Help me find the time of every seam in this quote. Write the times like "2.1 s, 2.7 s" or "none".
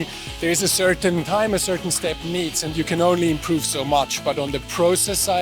1.3 s